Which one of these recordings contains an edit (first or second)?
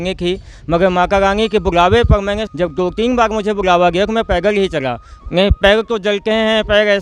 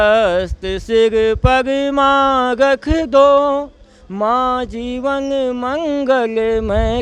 first